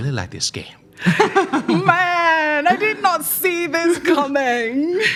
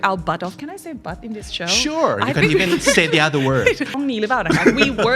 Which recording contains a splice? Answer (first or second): second